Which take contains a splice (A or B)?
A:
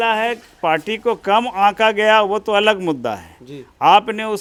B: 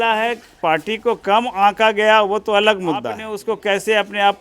B